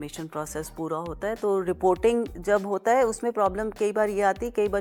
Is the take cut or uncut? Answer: uncut